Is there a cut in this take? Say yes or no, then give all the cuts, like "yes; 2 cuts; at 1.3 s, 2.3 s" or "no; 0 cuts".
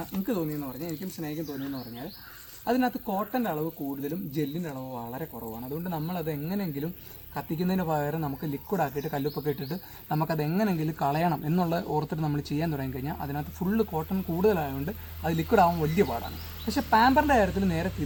no; 0 cuts